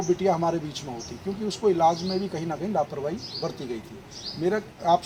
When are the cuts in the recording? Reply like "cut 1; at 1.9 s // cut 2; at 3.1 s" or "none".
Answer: none